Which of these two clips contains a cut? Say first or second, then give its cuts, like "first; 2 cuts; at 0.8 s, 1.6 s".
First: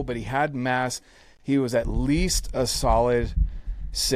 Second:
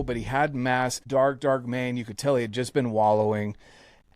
second; 1 cut; at 1.0 s